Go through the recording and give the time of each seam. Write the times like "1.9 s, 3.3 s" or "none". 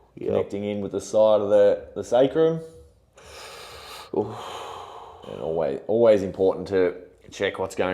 5.1 s